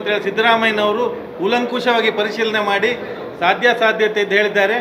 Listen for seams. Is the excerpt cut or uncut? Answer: uncut